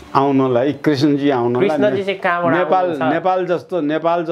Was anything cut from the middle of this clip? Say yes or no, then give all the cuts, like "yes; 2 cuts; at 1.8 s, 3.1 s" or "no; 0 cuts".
no; 0 cuts